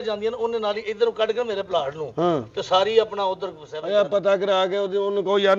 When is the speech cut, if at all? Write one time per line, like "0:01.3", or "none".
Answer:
none